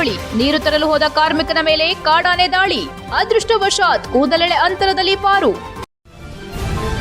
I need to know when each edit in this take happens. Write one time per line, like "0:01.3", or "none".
0:05.8